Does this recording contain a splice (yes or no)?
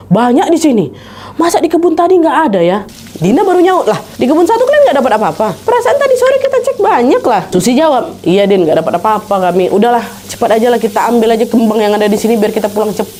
no